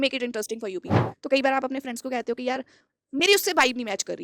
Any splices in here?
yes; 1 cut; at 1.1 s

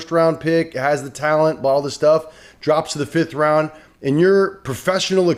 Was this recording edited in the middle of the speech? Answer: no; 0 cuts

